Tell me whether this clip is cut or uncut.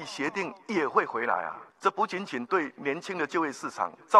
cut